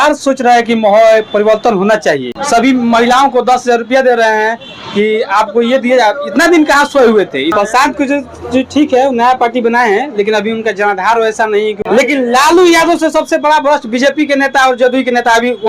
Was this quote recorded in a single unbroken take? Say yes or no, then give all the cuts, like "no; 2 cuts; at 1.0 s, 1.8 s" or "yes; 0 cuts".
no; 3 cuts; at 2.3 s, 7.5 s, 11.8 s